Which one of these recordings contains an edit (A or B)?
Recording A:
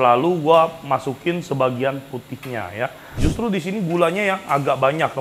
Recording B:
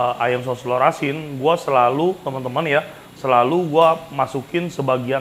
A